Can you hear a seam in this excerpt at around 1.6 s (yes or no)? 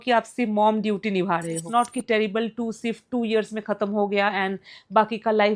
yes